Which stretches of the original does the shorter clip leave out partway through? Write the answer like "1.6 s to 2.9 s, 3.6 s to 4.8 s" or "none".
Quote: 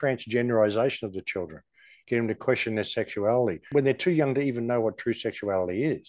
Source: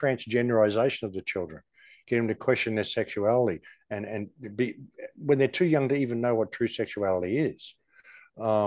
3.6 s to 5.2 s